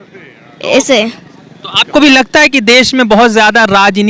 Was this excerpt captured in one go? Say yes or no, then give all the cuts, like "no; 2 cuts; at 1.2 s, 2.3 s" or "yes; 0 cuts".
yes; 0 cuts